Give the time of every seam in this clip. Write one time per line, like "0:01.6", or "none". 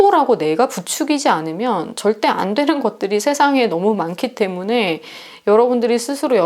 none